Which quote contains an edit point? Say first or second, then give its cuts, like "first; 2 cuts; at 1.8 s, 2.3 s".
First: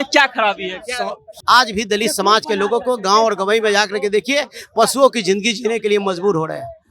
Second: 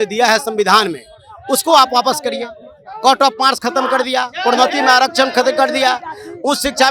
first; 1 cut; at 1.3 s